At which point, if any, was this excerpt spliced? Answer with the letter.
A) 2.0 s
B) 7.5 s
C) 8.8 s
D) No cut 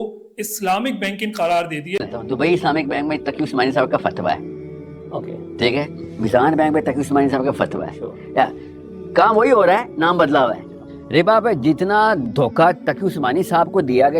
A